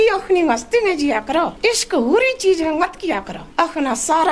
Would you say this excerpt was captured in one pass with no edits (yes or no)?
no